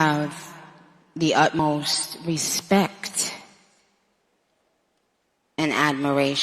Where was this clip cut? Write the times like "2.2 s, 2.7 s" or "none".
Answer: 1.6 s, 3.3 s